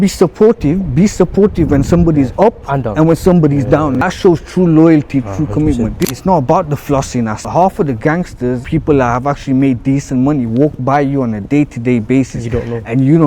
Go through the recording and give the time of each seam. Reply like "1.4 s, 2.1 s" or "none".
4.0 s, 6.0 s, 7.4 s, 8.6 s